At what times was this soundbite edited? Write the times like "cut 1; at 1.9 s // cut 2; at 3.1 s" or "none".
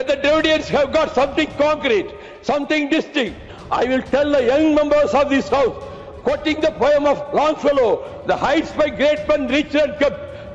cut 1; at 3.5 s